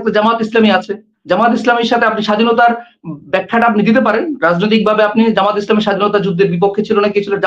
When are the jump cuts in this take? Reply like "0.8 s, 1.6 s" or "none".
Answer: 1.1 s